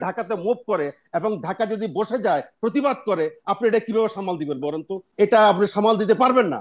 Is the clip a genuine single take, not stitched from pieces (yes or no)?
no